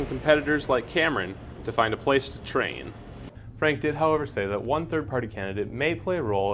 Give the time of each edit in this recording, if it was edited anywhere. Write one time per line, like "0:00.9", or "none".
0:03.2